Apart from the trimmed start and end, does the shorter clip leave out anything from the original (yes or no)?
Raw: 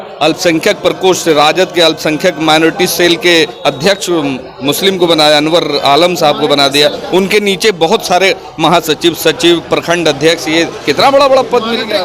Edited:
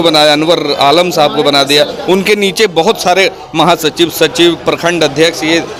no